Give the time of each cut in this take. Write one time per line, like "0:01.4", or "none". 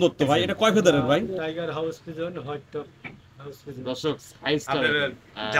0:01.3
0:04.9